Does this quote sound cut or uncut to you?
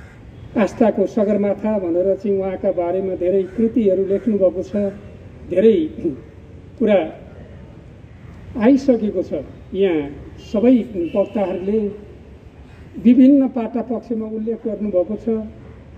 uncut